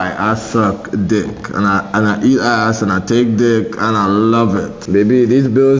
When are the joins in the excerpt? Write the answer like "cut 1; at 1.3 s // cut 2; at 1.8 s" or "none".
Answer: cut 1; at 4.8 s